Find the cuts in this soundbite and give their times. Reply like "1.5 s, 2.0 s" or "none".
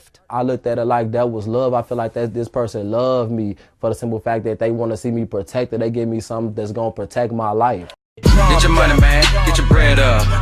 7.9 s